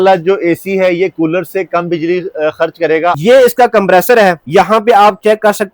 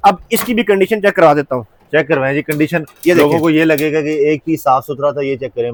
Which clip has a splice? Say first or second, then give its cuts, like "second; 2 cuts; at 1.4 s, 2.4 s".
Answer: first; 2 cuts; at 3.2 s, 4.4 s